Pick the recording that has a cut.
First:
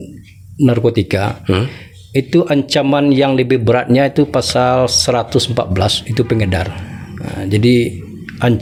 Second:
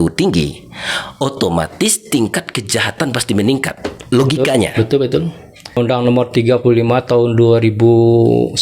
second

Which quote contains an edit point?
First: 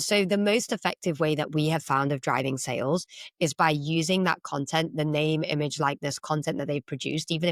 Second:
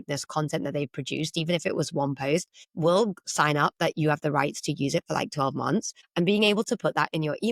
second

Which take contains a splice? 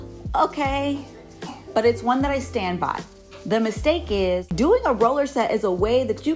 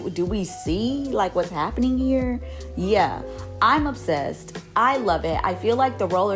first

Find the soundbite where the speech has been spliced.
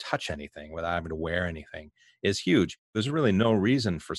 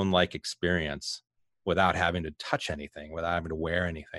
first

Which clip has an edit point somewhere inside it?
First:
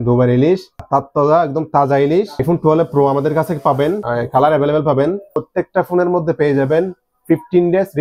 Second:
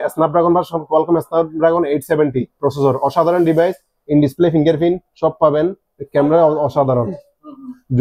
first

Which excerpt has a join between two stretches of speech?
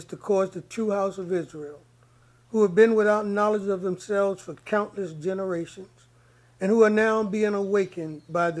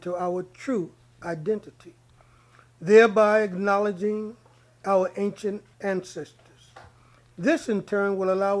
second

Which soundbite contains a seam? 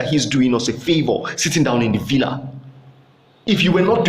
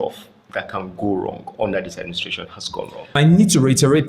second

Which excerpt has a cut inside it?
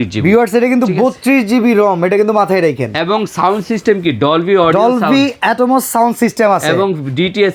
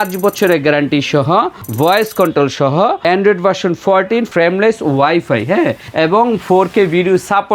second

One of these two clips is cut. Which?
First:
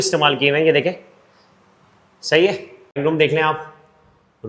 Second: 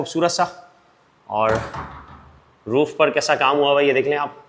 first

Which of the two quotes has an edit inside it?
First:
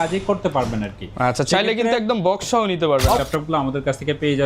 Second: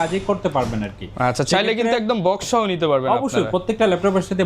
first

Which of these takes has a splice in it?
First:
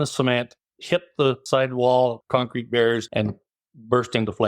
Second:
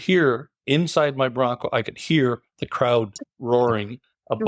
first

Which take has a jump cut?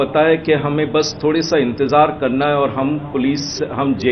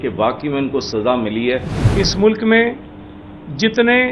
second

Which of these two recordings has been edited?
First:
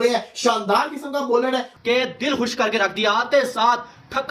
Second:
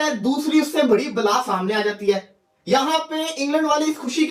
first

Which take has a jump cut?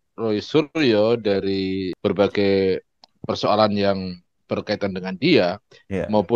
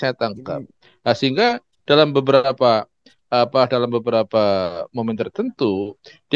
first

